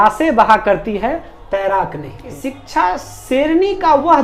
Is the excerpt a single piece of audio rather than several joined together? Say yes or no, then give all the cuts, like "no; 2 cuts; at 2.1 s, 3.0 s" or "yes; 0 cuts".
no; 1 cut; at 2.3 s